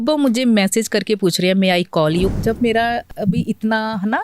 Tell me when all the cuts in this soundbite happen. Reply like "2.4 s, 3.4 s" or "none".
2.3 s, 3.1 s